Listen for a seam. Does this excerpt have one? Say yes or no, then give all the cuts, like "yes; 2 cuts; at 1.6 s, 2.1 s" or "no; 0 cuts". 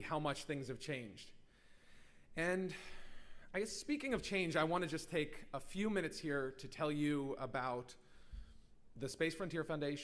no; 0 cuts